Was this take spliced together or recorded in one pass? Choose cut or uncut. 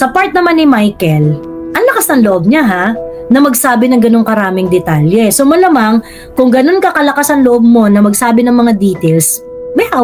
uncut